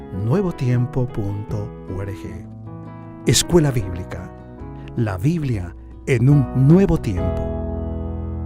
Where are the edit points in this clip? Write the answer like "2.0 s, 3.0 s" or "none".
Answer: 7.2 s

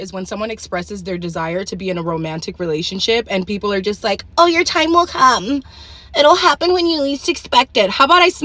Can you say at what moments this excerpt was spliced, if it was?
none

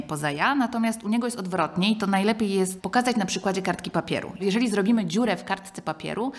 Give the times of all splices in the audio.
2.8 s

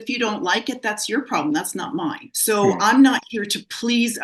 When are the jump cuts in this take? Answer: 2.3 s

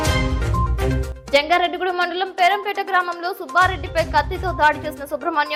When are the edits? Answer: none

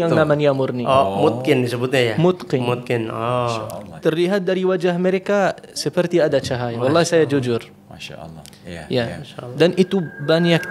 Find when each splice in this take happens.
none

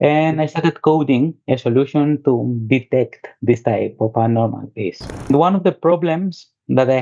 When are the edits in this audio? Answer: 5.3 s

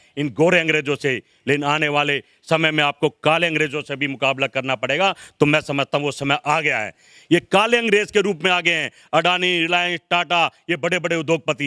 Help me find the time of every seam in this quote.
none

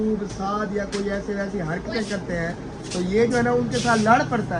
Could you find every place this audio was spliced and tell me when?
none

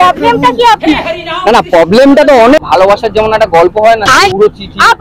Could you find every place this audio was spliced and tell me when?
2.6 s

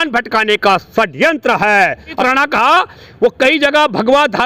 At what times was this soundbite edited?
2.2 s

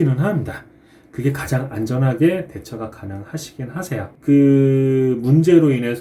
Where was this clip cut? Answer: 4.1 s

